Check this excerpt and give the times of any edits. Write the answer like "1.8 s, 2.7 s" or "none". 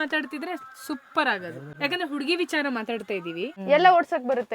1.6 s, 3.6 s